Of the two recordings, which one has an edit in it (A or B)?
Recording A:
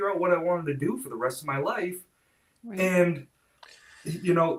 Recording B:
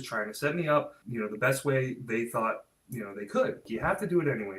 B